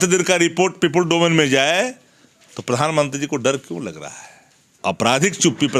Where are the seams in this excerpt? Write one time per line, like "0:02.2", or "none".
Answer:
0:04.7